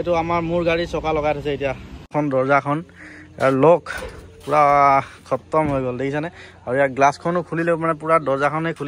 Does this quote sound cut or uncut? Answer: cut